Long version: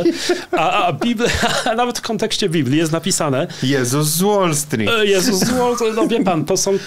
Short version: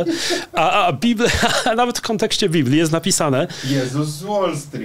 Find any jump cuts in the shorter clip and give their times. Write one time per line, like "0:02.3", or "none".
none